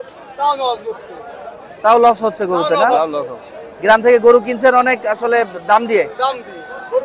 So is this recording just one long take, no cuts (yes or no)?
yes